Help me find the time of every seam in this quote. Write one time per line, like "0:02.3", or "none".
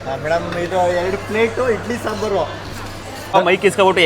0:03.2